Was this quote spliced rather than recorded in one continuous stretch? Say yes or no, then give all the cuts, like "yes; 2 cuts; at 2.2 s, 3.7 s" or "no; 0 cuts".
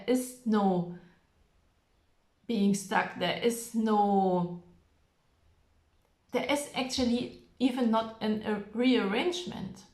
no; 0 cuts